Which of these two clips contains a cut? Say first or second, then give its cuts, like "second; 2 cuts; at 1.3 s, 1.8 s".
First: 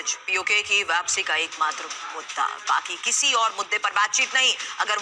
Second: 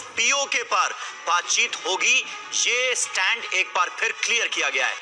second; 1 cut; at 3.9 s